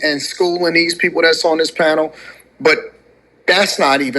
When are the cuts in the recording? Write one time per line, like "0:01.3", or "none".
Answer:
none